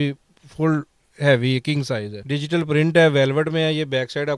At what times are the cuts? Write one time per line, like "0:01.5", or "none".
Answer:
0:02.2